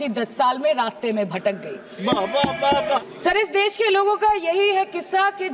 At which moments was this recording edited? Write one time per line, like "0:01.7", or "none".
0:03.0